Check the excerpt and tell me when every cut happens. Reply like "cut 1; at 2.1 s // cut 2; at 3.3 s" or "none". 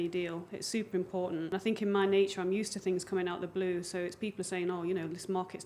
cut 1; at 1.5 s